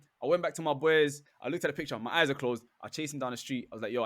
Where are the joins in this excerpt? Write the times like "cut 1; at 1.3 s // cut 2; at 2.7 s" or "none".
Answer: cut 1; at 1.3 s